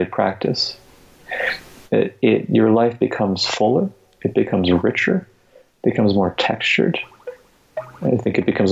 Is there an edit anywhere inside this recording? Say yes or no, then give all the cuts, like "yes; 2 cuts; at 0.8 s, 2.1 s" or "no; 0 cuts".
no; 0 cuts